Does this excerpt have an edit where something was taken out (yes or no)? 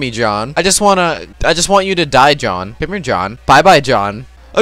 yes